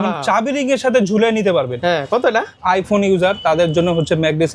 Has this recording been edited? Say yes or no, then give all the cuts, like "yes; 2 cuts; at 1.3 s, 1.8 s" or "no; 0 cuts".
yes; 1 cut; at 2.5 s